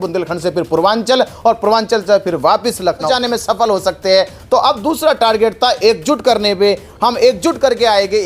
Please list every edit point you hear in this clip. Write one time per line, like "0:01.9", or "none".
0:03.1